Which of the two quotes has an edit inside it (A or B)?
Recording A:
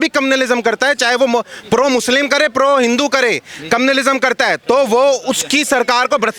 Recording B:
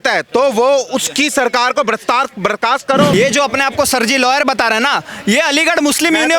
B